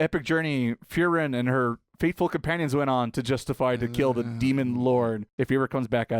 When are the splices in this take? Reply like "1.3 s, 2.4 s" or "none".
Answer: 5.2 s